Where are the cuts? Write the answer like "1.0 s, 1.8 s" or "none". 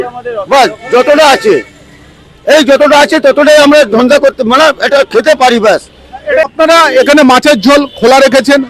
6.4 s